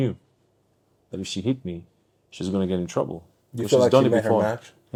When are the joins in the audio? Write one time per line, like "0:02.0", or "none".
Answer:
none